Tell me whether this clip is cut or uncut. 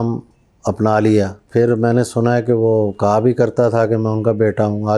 cut